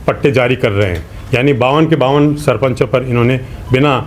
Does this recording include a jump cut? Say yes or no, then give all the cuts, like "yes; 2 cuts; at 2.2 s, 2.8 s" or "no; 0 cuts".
no; 0 cuts